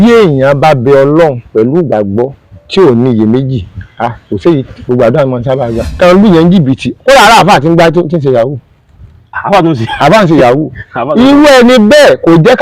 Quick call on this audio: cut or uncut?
cut